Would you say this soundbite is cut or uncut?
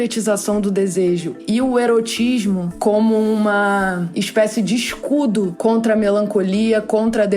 cut